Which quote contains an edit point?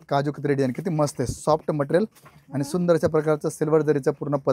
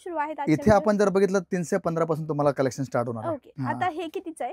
second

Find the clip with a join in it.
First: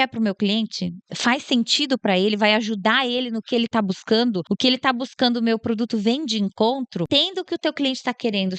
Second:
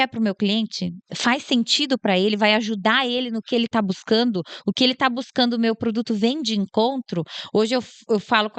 first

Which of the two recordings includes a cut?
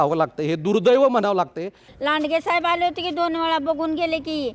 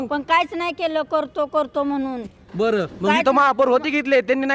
first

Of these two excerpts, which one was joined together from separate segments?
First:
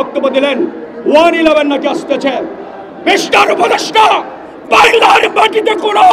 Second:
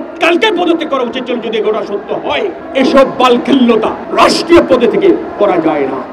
second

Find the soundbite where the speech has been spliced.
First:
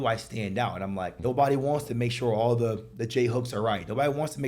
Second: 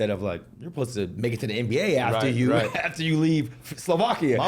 first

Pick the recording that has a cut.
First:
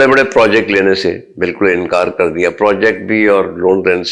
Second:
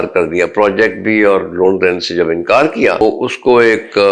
second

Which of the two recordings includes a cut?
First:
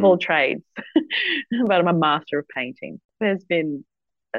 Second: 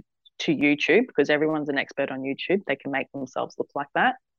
first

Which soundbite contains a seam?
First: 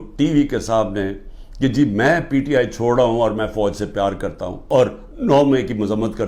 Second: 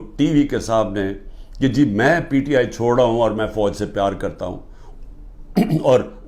first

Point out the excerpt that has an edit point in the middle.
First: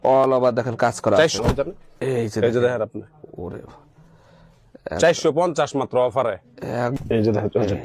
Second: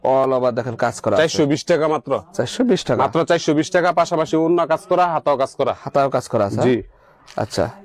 first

